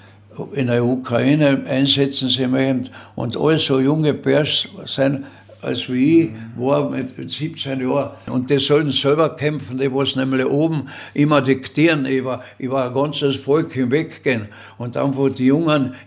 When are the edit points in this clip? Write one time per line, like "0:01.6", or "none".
0:08.3